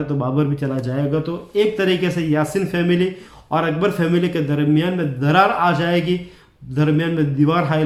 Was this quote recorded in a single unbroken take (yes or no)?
yes